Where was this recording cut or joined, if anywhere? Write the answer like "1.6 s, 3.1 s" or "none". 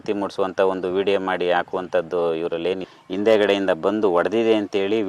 2.9 s